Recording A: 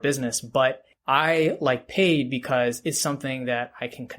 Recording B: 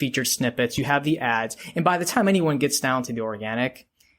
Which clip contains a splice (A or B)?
A